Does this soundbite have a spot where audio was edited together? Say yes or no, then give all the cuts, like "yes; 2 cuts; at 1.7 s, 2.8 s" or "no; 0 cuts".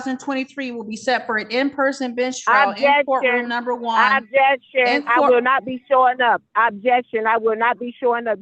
no; 0 cuts